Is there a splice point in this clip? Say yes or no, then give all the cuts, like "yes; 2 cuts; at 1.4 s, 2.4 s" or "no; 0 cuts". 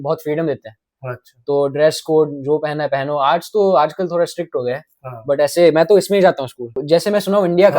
yes; 1 cut; at 6.8 s